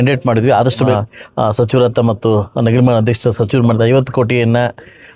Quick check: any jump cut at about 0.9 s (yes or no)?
yes